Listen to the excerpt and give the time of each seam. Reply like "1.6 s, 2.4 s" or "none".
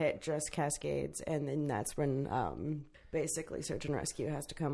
2.9 s